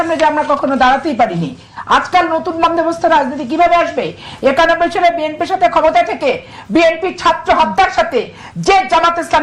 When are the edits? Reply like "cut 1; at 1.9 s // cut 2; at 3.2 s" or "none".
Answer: none